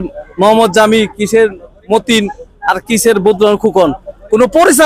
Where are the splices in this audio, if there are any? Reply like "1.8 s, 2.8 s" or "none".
none